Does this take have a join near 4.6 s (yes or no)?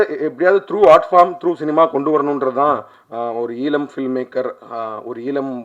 no